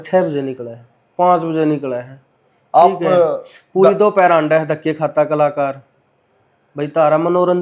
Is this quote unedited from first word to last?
yes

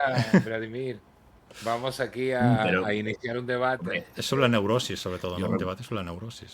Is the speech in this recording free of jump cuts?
yes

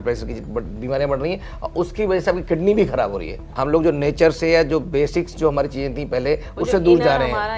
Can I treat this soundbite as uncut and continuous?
no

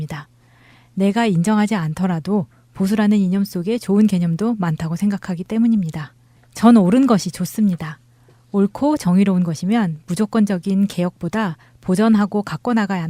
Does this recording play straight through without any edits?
no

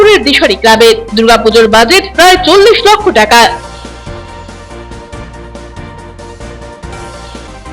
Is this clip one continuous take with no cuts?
yes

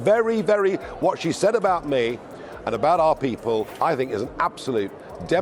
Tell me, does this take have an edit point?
yes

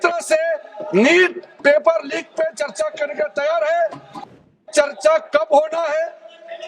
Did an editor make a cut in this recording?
yes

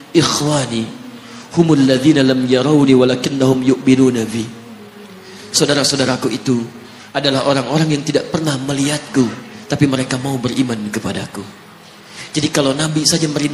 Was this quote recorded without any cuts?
yes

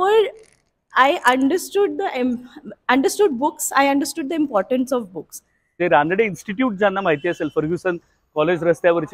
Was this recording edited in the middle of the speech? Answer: yes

